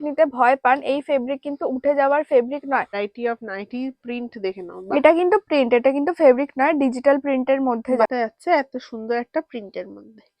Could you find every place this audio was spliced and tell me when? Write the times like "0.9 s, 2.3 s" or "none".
3.0 s, 8.1 s